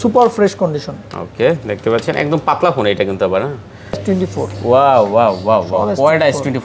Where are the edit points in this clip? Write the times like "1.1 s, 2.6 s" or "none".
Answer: 4.0 s